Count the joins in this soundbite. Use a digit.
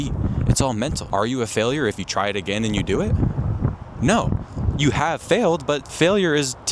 1